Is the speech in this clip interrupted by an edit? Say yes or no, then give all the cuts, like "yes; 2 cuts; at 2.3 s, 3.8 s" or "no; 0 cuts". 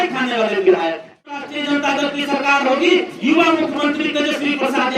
yes; 1 cut; at 1.5 s